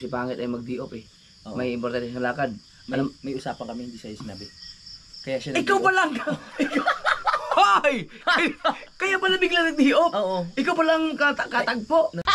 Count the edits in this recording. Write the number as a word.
zero